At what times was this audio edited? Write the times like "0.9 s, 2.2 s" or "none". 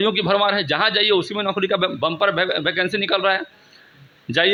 none